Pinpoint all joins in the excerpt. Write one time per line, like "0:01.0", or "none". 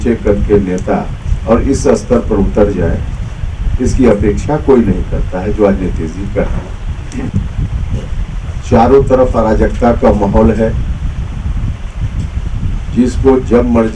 0:07.3